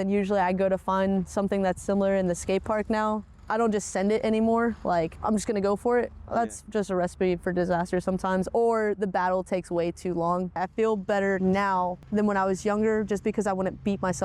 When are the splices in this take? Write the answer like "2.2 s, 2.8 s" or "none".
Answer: 3.3 s, 5.2 s, 10.6 s, 12.0 s